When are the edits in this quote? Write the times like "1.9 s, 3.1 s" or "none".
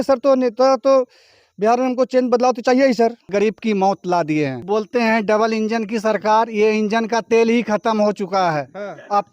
3.3 s, 4.6 s